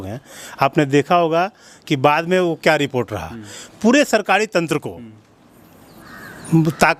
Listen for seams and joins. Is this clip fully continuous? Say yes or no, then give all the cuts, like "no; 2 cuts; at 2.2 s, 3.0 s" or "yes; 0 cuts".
yes; 0 cuts